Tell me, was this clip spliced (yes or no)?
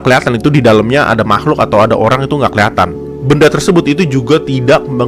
no